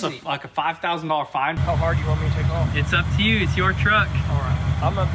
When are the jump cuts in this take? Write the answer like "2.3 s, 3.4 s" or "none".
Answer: 1.6 s